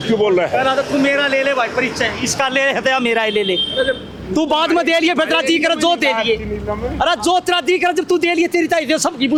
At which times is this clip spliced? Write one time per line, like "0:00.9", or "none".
none